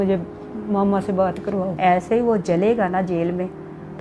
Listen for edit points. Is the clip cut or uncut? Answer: cut